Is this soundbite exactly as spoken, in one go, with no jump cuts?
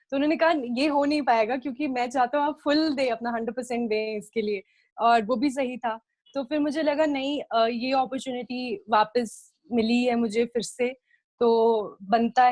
yes; 0 cuts

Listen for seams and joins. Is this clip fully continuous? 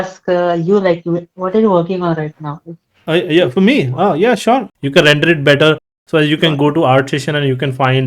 no; 1 cut; at 4.7 s

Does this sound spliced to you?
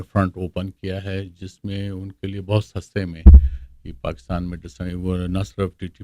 no; 0 cuts

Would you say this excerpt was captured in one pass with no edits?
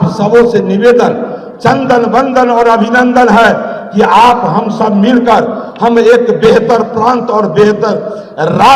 yes; 0 cuts

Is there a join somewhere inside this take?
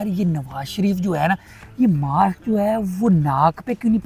no; 0 cuts

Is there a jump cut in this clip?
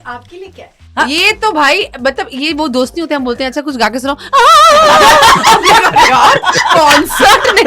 no; 0 cuts

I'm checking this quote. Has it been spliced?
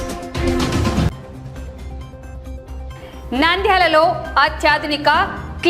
yes; 1 cut; at 1.1 s

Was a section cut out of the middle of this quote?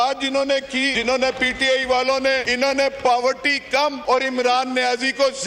yes; 3 cuts; at 0.9 s, 2.5 s, 4.0 s

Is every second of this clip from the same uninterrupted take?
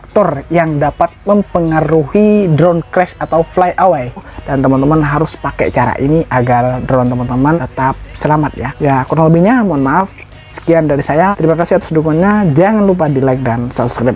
no; 4 cuts; at 4.2 s, 7.6 s, 8.7 s, 11.3 s

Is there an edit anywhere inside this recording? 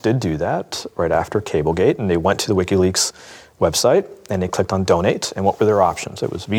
no; 0 cuts

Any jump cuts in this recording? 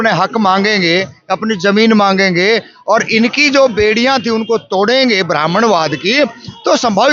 no; 0 cuts

